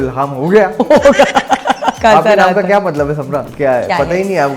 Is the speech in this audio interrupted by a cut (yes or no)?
yes